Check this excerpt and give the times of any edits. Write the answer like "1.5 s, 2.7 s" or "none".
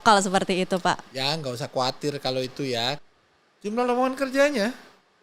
3.0 s